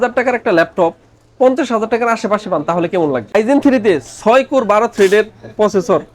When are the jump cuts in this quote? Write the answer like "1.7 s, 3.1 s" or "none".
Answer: 3.2 s